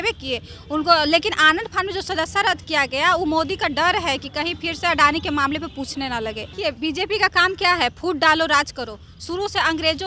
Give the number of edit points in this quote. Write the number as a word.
one